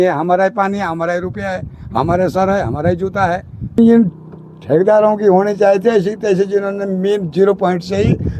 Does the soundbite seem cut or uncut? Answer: cut